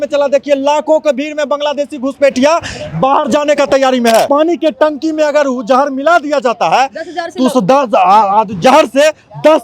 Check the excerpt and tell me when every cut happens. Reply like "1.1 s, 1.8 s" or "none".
4.3 s